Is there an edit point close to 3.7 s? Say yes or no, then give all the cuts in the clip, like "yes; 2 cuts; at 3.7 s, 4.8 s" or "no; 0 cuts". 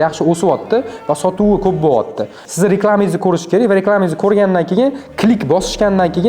no; 1 cut; at 2.4 s